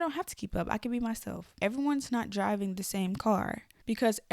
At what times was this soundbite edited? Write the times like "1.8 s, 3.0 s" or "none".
1.5 s